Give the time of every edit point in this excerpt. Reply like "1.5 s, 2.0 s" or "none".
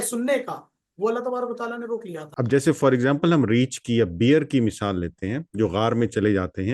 2.3 s